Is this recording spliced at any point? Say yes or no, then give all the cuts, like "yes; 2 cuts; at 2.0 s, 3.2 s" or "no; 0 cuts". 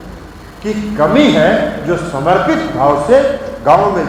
no; 0 cuts